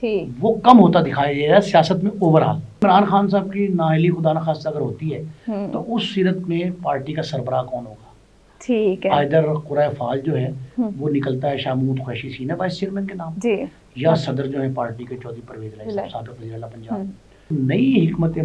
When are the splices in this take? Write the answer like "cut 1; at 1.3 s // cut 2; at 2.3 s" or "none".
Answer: cut 1; at 2.8 s // cut 2; at 17.5 s